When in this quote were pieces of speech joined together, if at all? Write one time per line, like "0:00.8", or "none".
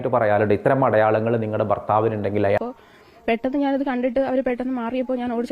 0:02.6